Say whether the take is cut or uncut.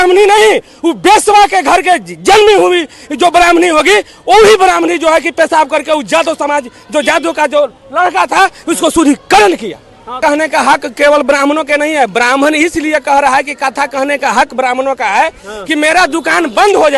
cut